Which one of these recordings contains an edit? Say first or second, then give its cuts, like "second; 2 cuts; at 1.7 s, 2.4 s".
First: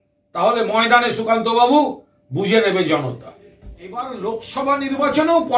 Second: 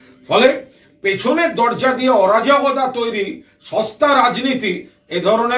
first; 1 cut; at 4.0 s